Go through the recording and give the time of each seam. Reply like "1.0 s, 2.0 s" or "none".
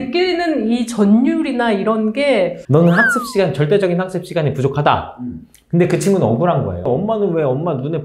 2.6 s, 6.9 s

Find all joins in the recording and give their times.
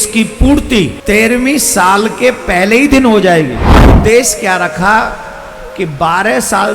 1.0 s, 3.9 s

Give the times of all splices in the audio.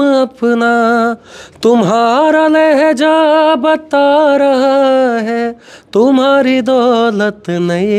none

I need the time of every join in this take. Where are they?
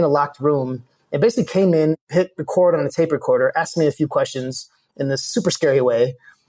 2.0 s

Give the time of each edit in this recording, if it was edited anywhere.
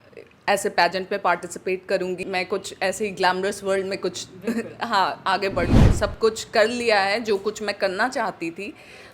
2.2 s, 5.8 s

